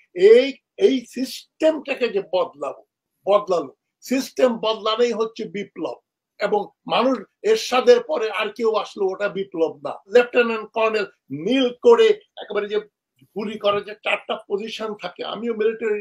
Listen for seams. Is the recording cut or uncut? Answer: cut